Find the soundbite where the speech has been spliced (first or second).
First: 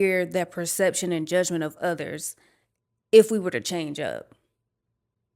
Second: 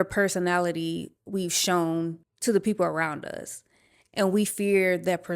second